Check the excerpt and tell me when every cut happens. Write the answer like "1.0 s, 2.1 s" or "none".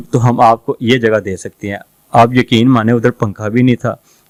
none